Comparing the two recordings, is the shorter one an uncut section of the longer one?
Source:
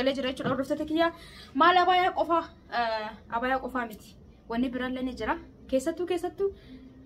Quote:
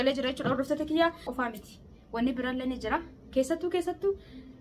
no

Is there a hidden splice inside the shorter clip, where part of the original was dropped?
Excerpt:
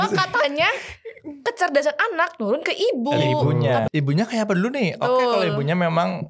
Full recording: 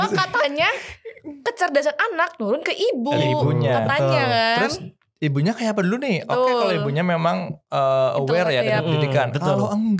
yes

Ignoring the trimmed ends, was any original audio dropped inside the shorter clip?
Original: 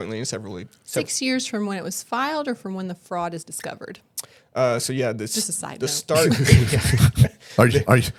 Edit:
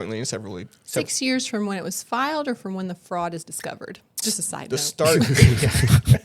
yes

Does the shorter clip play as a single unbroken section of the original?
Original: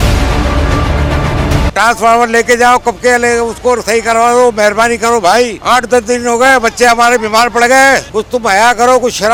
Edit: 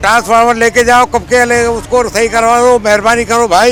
yes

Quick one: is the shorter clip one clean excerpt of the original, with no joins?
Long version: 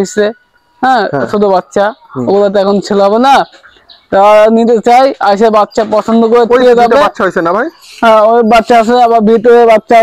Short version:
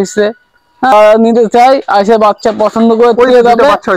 no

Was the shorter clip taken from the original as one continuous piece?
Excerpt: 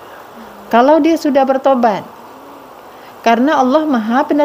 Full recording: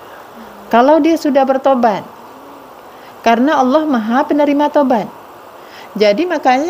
yes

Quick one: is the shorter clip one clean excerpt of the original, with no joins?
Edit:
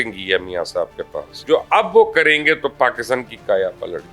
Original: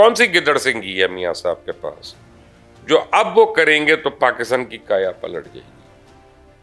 no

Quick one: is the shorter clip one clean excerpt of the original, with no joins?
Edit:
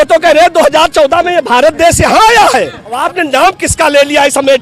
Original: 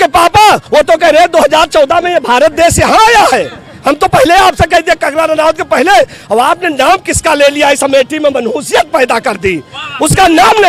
no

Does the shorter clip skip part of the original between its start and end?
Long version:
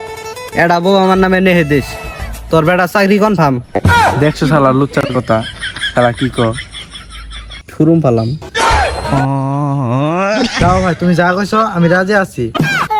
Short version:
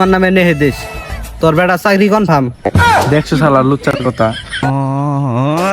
yes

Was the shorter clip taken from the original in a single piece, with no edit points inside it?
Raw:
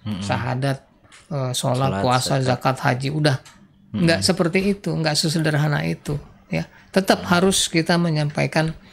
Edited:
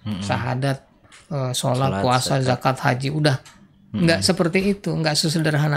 yes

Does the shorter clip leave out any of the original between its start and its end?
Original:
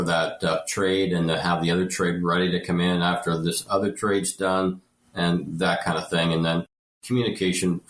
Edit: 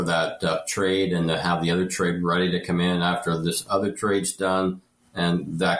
no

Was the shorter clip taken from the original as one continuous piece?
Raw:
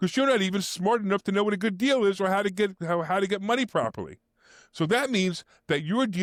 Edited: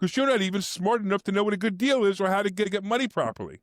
no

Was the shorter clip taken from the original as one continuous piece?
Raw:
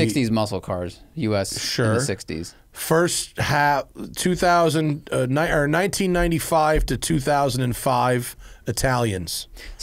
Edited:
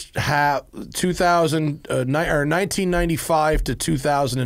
yes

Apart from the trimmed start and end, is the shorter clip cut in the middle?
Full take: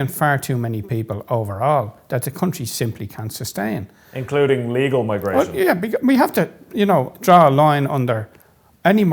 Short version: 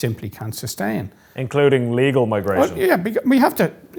no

